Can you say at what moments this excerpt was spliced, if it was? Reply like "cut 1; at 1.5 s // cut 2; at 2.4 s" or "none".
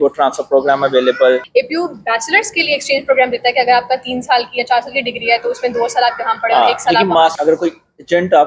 cut 1; at 1.5 s // cut 2; at 7.3 s